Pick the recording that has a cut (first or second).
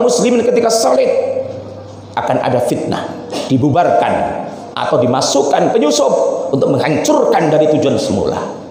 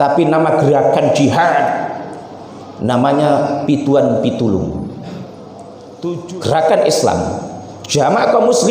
second